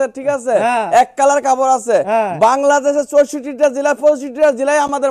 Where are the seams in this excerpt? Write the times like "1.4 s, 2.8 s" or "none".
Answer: none